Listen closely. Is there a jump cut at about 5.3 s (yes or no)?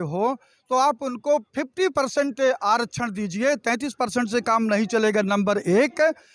no